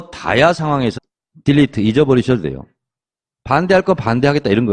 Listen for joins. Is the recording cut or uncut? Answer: uncut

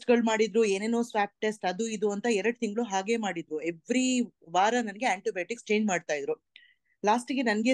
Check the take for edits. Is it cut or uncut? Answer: uncut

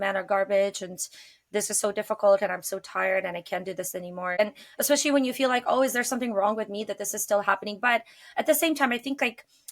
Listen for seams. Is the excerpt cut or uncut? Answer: cut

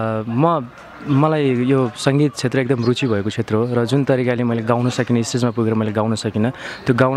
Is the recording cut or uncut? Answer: uncut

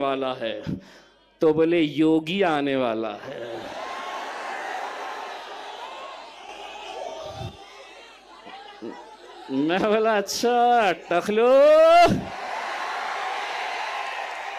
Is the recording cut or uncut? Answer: uncut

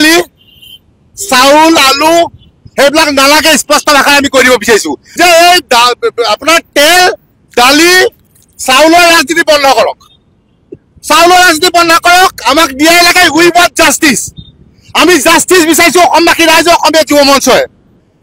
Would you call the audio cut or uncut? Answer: uncut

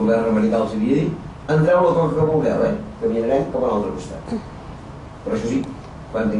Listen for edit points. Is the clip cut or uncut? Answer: cut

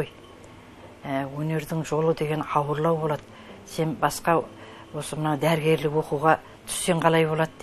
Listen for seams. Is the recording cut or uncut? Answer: uncut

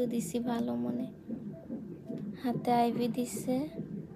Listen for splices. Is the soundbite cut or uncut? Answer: uncut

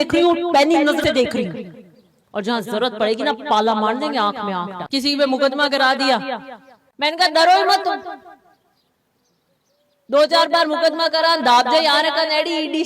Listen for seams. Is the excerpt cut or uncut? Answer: cut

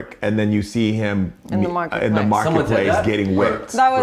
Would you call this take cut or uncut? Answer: uncut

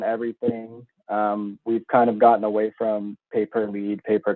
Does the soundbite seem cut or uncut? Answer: uncut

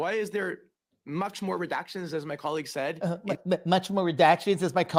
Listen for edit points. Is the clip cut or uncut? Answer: uncut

